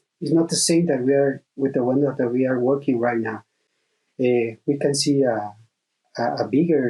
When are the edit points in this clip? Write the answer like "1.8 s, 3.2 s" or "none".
none